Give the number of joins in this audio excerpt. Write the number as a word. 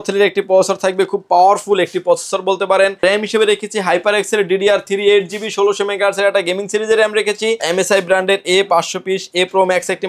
two